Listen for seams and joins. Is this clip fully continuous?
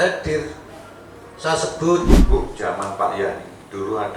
no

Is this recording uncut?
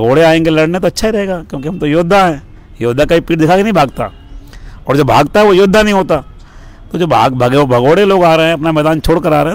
yes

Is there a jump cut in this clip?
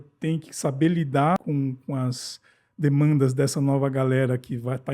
yes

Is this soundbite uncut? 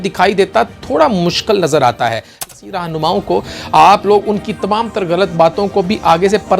no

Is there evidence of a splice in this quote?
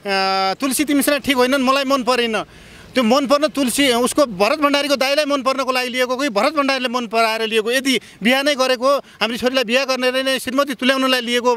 no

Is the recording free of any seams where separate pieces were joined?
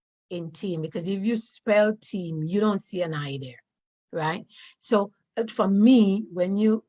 yes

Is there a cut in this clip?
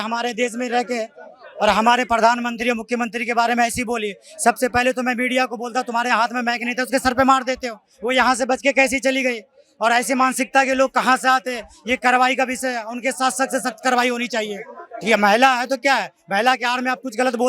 no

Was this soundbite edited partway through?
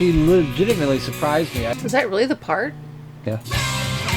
yes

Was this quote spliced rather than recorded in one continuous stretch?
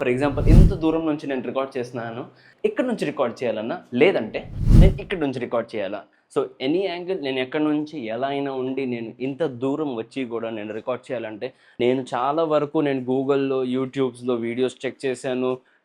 yes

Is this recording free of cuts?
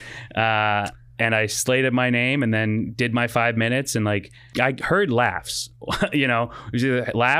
no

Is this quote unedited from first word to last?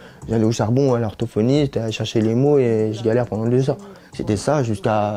yes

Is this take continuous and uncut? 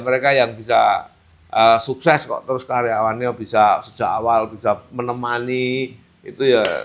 yes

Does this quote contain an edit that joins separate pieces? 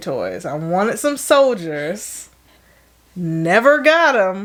no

